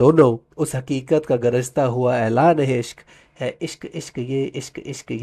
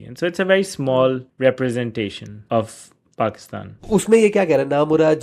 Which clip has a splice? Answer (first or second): second